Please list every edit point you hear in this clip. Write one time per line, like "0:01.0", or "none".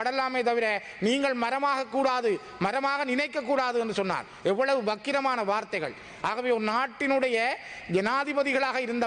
none